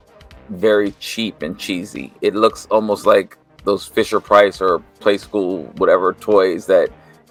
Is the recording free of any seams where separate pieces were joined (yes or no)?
yes